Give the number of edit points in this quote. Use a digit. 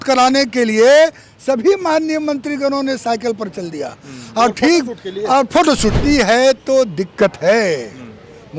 1